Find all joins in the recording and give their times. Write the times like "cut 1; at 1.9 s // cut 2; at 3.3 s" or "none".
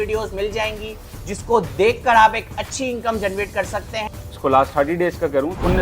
cut 1; at 4.2 s